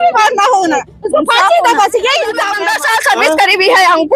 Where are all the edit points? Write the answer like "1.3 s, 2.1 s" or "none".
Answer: 2.5 s